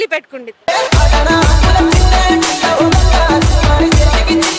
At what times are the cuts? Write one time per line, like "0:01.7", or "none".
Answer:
none